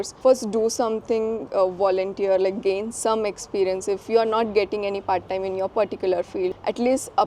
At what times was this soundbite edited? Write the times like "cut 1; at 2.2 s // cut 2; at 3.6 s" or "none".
none